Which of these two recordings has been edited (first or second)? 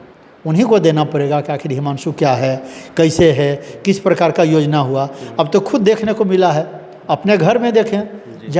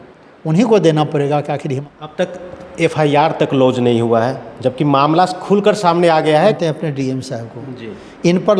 second